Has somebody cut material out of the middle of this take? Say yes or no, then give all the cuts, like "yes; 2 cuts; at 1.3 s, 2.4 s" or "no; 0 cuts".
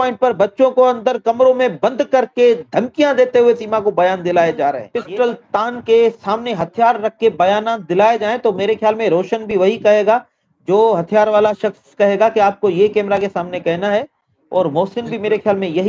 yes; 1 cut; at 4.9 s